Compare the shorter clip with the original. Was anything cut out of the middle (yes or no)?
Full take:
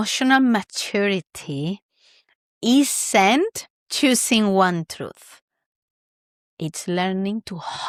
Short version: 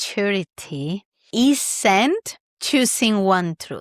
yes